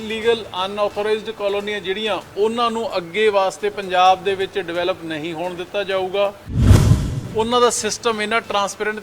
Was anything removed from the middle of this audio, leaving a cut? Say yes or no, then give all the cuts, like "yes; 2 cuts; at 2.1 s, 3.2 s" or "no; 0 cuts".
yes; 1 cut; at 6.8 s